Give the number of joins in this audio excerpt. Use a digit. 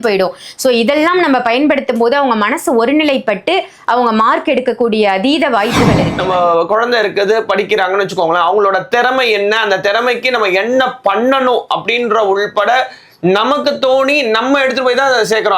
1